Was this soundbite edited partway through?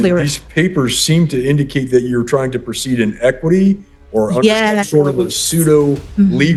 no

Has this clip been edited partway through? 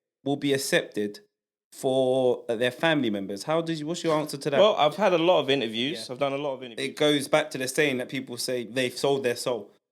yes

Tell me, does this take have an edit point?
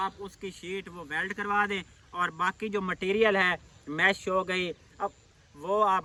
no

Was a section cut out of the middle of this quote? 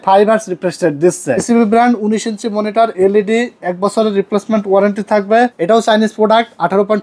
yes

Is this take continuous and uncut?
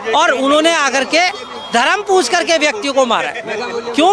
yes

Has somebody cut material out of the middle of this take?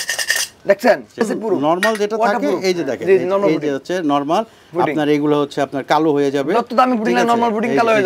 yes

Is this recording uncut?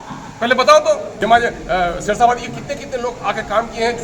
no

